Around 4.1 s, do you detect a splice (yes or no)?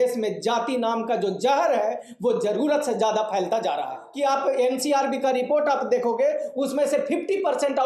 yes